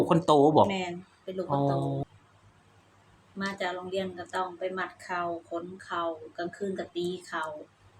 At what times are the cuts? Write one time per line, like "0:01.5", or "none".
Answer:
0:02.0